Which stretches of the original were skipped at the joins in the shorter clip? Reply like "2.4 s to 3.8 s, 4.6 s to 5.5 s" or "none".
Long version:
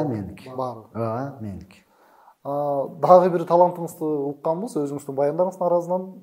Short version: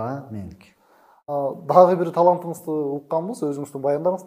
2.4 s to 2.6 s